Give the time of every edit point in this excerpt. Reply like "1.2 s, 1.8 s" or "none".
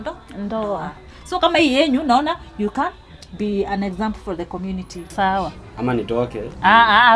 5.1 s